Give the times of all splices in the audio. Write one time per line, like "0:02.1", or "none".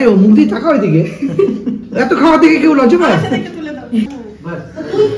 0:04.1